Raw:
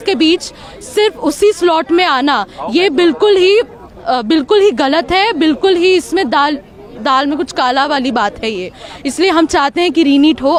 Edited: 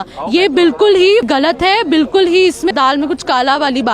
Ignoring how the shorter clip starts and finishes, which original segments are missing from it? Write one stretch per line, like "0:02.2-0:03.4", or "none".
0:03.7-0:04.8
0:06.2-0:07.0